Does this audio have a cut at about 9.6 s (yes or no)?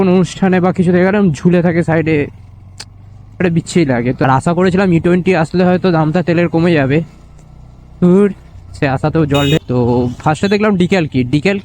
yes